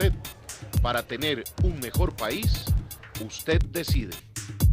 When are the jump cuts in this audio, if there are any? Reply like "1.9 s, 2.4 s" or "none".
3.7 s